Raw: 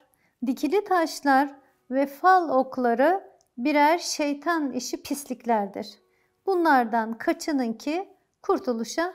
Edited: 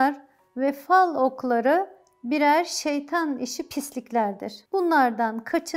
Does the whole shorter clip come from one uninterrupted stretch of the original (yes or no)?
no